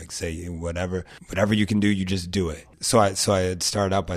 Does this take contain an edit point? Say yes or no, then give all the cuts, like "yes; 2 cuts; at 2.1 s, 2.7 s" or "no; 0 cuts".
yes; 2 cuts; at 1.2 s, 2.7 s